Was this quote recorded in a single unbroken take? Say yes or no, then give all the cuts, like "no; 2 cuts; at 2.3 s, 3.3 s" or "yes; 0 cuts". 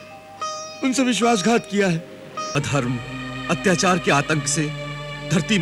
no; 1 cut; at 2.5 s